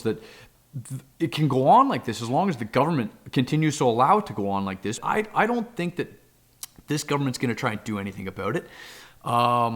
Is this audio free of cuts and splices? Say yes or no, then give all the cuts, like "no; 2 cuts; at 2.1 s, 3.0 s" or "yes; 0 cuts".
no; 1 cut; at 5.0 s